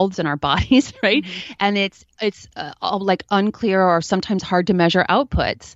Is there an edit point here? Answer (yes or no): no